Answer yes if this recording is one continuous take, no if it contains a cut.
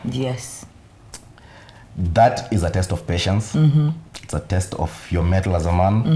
yes